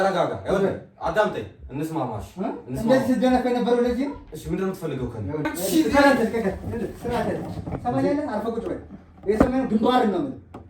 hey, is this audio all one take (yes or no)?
no